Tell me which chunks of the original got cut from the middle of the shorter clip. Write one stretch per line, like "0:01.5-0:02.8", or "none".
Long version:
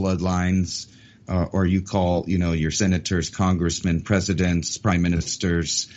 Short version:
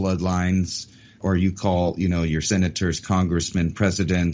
0:01.2-0:01.5